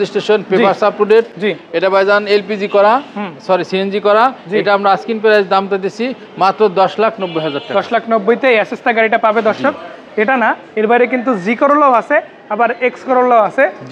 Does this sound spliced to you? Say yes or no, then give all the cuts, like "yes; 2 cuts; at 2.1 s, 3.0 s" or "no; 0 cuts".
no; 0 cuts